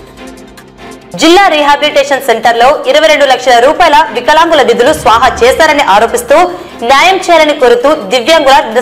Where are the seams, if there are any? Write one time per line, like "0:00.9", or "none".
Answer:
0:01.1

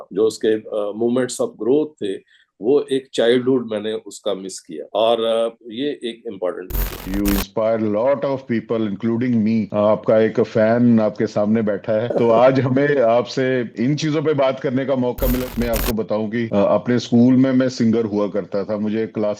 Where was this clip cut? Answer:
0:07.0
0:15.5

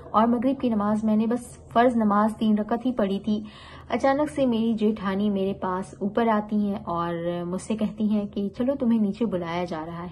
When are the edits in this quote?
none

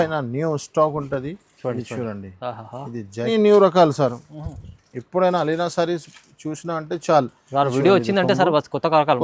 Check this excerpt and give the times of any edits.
0:03.3

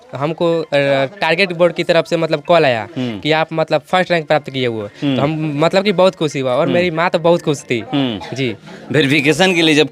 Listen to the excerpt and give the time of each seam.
none

